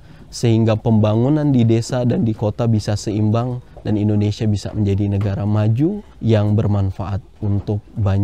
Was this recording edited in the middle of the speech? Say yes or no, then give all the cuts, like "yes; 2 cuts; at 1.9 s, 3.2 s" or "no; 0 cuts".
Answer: yes; 1 cut; at 6.1 s